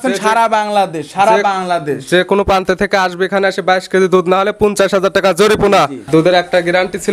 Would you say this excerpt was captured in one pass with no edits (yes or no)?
no